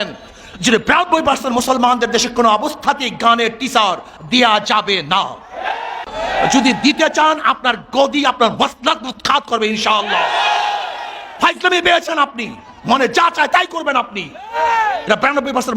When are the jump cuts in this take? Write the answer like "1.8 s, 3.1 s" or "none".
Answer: 6.1 s